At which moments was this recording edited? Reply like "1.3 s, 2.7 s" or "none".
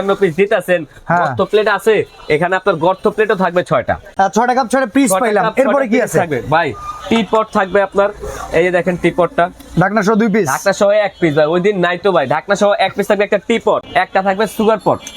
4.1 s, 13.9 s